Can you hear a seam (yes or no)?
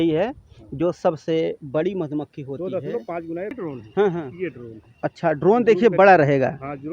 yes